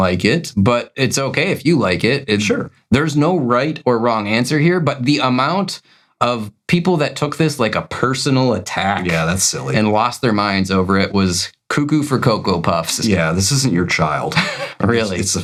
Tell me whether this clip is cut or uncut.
uncut